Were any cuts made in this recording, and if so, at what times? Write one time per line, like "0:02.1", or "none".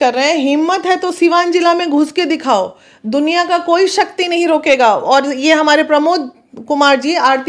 none